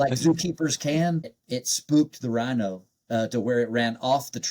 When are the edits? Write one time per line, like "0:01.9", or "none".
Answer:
0:01.4

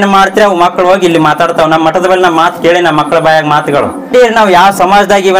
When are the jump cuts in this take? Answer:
0:04.1

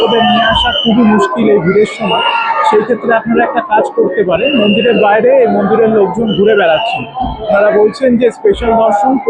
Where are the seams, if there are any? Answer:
none

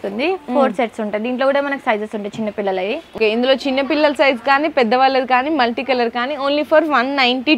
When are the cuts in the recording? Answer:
0:03.1

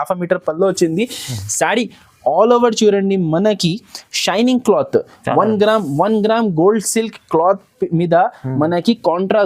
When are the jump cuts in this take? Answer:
none

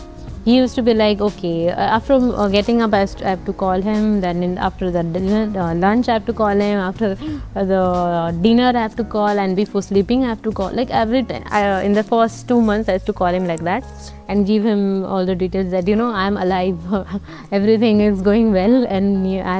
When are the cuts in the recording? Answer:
none

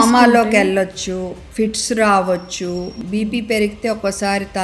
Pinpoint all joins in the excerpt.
0:01.4
0:03.0

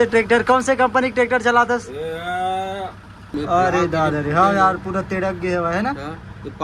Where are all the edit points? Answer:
0:03.3

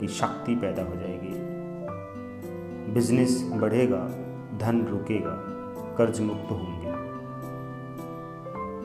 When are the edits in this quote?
none

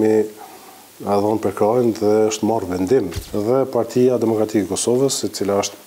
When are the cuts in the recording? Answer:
0:03.2

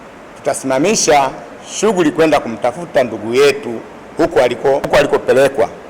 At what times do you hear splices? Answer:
0:04.9

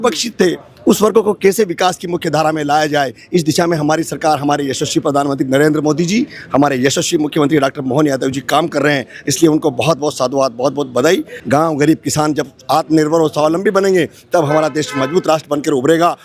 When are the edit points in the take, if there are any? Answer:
0:11.4

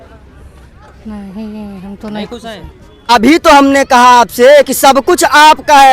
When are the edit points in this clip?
0:03.1

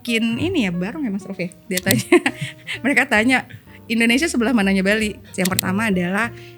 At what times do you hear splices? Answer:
0:01.6
0:05.2

